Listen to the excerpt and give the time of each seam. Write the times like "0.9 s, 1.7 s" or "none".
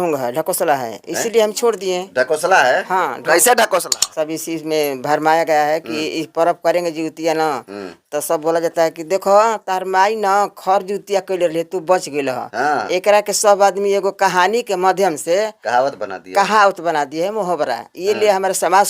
4.0 s